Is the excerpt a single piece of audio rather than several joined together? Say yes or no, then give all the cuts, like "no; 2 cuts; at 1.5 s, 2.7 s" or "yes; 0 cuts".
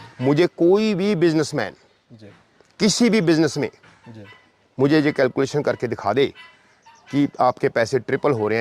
yes; 0 cuts